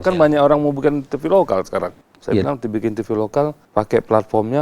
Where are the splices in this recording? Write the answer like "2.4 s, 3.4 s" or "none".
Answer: 2.1 s, 3.6 s